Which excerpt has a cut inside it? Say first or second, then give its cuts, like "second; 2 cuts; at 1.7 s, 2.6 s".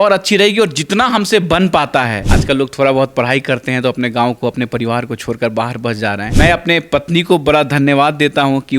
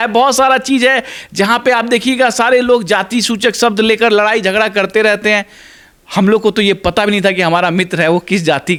first; 2 cuts; at 2.3 s, 6.3 s